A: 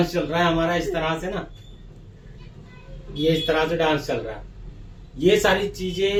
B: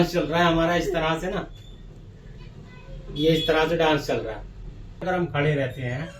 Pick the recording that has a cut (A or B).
B